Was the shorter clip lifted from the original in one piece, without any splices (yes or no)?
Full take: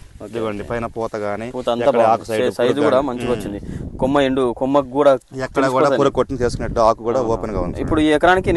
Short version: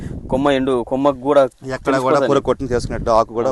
yes